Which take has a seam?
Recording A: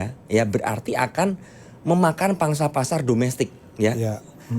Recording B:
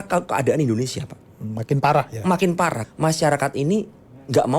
B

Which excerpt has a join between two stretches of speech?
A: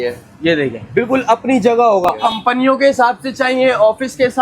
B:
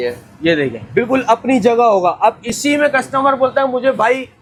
A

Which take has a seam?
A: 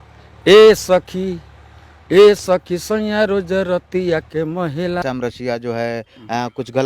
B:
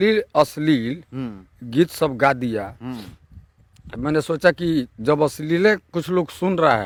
A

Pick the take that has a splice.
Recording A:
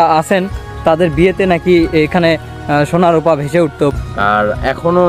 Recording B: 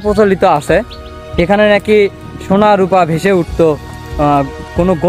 A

